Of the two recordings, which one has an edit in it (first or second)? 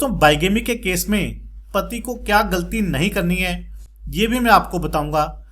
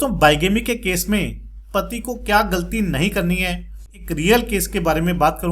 second